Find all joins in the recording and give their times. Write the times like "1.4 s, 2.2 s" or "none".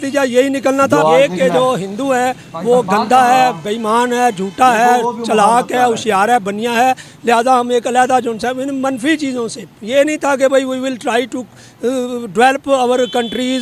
1.0 s